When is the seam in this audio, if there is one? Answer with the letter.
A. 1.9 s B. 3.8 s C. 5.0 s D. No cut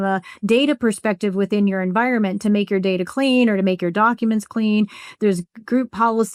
D